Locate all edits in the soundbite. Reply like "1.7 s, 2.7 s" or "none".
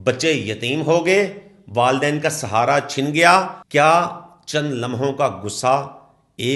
3.6 s